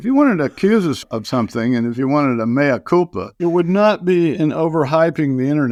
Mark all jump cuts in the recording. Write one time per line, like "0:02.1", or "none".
none

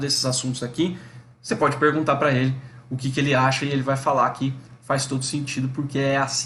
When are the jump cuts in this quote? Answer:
none

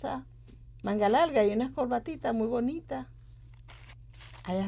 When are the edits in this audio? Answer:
none

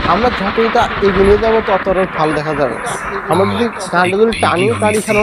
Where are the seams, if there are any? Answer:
none

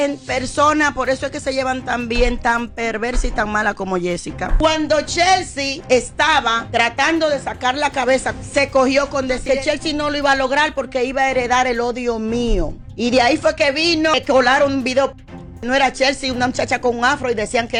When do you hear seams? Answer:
none

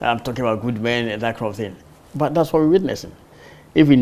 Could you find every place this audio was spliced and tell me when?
none

